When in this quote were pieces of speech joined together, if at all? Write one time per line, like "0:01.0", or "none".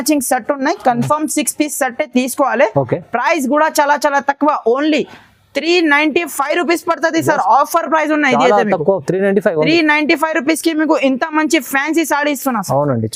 none

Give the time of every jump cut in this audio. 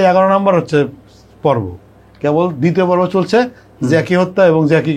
none

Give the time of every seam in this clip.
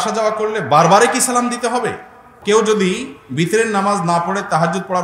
0:02.4

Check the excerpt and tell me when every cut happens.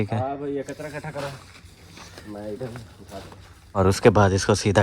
0:03.8

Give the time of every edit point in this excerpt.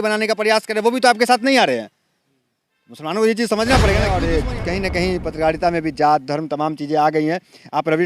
0:04.1

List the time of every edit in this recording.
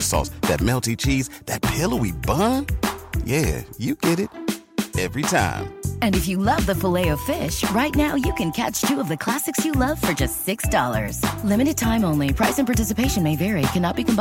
none

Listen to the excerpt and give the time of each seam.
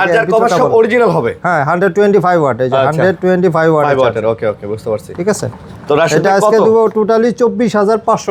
none

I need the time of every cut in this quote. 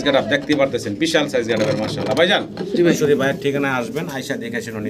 0:03.0

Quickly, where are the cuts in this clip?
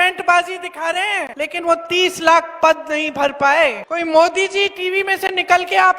0:01.3
0:03.8

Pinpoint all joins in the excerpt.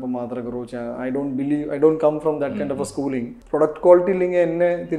0:03.3

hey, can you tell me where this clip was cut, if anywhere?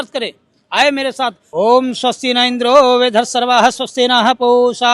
0:01.4

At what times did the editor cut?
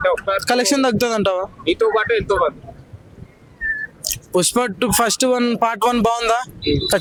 none

